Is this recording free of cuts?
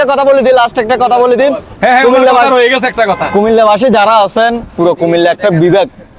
yes; 0 cuts

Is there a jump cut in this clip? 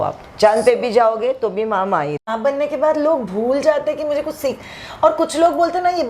yes; 1 cut; at 2.2 s

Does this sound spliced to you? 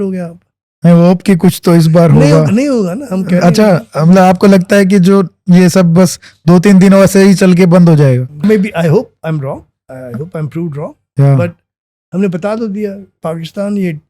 yes; 2 cuts; at 8.4 s, 13.2 s

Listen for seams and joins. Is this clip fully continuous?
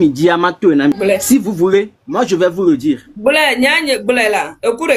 yes; 0 cuts

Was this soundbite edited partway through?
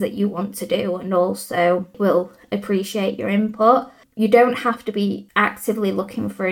yes; 3 cuts; at 2.0 s, 4.0 s, 5.2 s

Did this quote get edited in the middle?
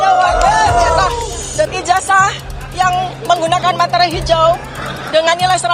yes; 1 cut; at 1.7 s

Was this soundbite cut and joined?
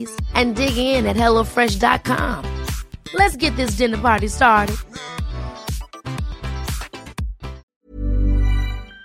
yes; 1 cut; at 7.6 s

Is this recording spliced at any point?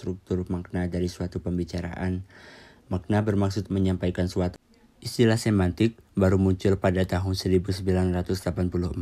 yes; 1 cut; at 4.5 s

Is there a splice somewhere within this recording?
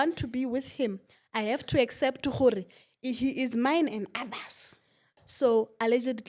yes; 1 cut; at 5.1 s

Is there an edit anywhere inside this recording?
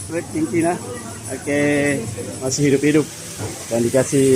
yes; 1 cut; at 2.5 s

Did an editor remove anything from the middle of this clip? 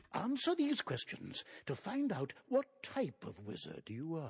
no; 0 cuts

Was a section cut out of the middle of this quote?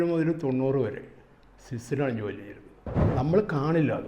yes; 1 cut; at 3.0 s

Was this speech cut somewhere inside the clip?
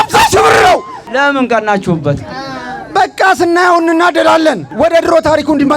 yes; 2 cuts; at 1.0 s, 4.7 s

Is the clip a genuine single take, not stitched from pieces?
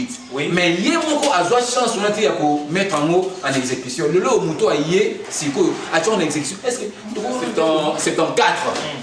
no; 1 cut; at 7.5 s

